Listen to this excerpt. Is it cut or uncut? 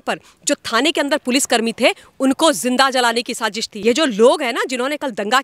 cut